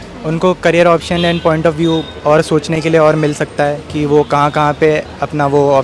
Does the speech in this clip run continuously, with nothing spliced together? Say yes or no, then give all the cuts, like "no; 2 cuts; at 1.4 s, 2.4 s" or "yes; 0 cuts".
yes; 0 cuts